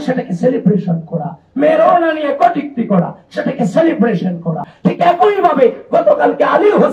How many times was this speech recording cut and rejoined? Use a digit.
1